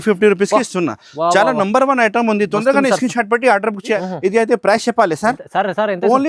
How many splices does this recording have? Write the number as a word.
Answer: one